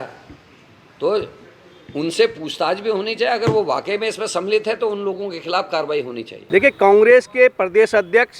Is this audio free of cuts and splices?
no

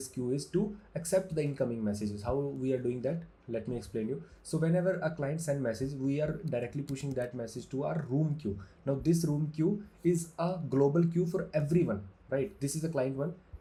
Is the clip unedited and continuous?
yes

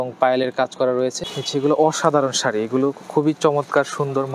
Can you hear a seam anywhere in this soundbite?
yes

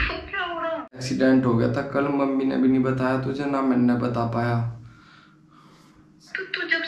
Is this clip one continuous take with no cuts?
no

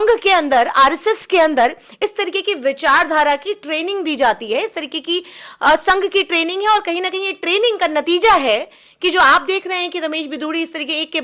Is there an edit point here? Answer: no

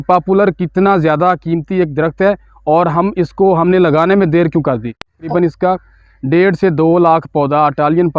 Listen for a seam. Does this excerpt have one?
yes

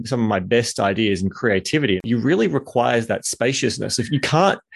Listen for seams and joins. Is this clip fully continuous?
no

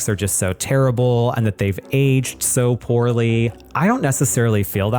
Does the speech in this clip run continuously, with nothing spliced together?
no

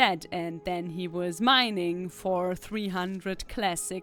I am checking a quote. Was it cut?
no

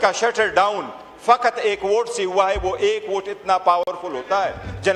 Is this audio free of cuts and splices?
yes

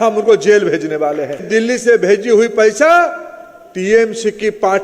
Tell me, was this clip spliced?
yes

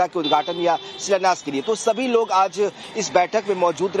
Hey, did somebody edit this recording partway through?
yes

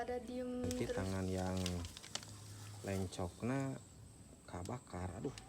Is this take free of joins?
no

